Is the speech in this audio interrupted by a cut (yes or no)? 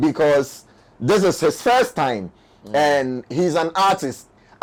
no